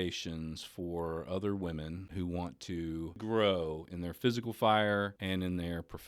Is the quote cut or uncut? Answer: cut